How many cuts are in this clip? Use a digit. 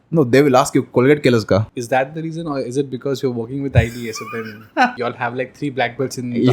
2